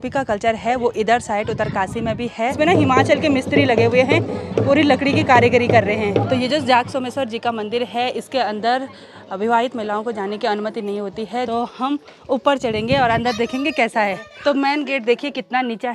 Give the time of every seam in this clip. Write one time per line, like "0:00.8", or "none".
0:02.5
0:06.3
0:11.5
0:14.3